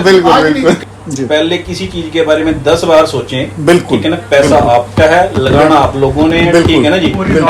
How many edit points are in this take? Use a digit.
1